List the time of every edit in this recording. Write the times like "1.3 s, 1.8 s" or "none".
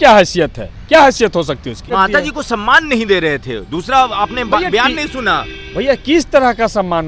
1.8 s

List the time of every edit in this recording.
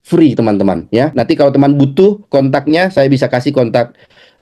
1.1 s

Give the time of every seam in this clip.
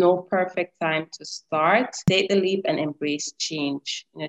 2.0 s

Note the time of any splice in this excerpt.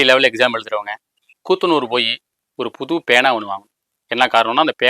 0.9 s, 3.9 s

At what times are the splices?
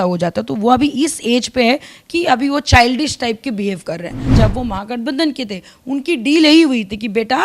4.3 s

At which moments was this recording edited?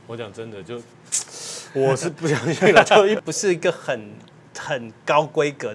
3.2 s

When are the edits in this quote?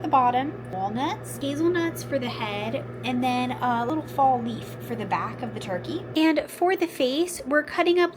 1.1 s, 3.9 s

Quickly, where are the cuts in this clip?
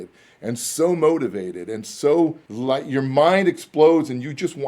2.5 s

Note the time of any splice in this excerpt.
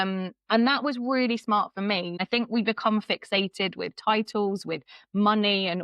2.2 s

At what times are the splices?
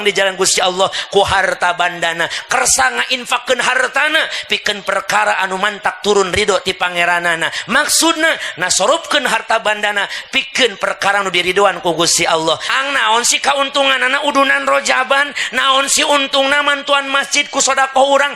12.7 s

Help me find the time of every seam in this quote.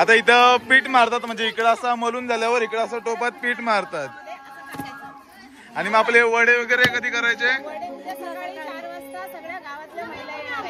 none

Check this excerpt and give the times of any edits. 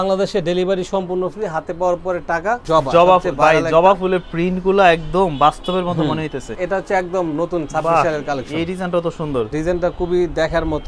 2.6 s, 6.5 s, 9.5 s

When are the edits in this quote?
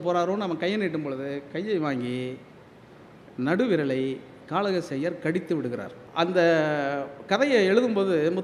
6.0 s

